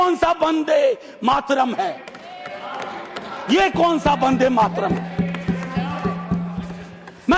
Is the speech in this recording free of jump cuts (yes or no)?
yes